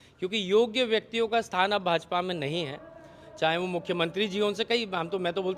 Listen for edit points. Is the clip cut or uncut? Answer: uncut